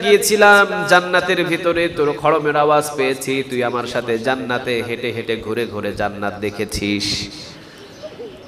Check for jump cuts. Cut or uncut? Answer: uncut